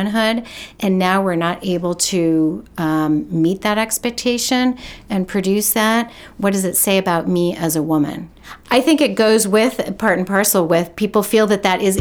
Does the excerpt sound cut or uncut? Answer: uncut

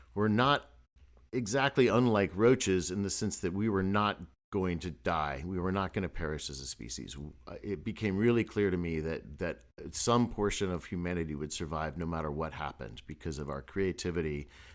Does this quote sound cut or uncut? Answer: uncut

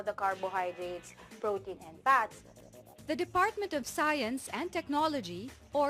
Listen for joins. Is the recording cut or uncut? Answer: cut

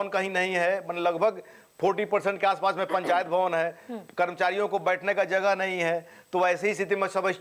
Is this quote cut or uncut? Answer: uncut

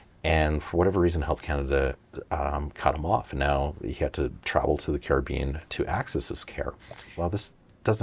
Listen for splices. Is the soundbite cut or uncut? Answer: cut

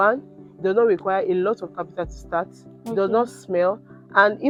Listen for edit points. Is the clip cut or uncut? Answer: uncut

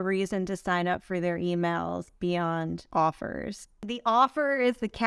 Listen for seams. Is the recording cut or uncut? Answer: cut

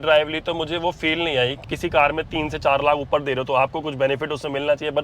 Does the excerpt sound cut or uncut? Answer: cut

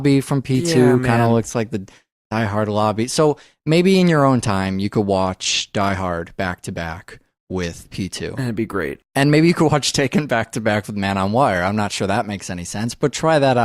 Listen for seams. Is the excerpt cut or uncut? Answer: cut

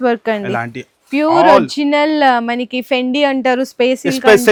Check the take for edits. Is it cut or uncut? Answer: uncut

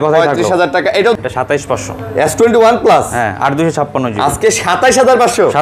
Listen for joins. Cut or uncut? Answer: cut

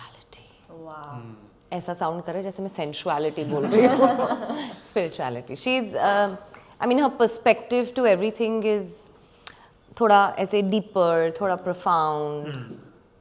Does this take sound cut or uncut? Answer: uncut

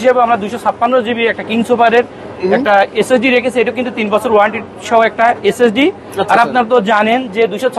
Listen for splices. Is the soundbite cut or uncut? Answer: uncut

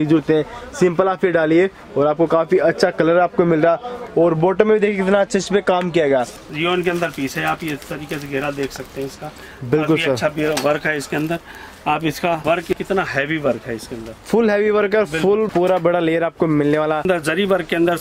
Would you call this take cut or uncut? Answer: cut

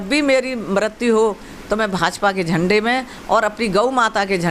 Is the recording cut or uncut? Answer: uncut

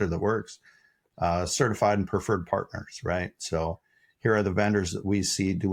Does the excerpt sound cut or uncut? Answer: uncut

